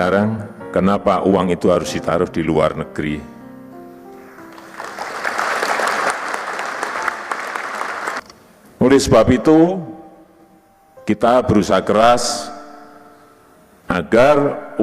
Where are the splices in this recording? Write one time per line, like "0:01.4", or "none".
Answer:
0:08.2